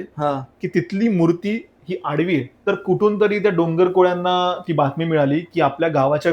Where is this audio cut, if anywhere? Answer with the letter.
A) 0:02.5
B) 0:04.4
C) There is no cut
A